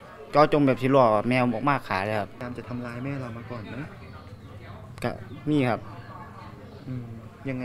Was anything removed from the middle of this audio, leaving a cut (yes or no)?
no